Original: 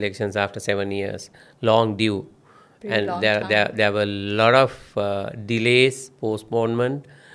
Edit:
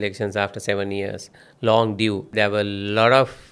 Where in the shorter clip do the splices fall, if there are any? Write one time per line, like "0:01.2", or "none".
0:02.3